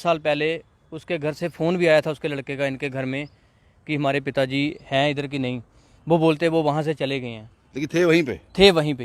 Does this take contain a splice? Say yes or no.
no